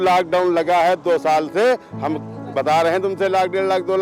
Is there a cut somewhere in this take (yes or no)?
no